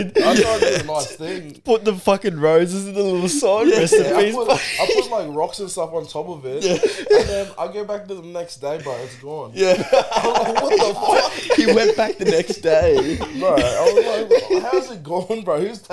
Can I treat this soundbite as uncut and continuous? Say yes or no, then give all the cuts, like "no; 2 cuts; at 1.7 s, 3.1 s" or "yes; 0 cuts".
yes; 0 cuts